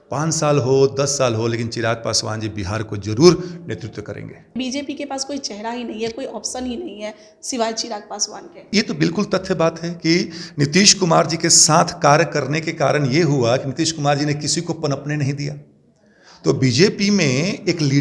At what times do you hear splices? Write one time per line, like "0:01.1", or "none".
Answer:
0:04.6
0:08.7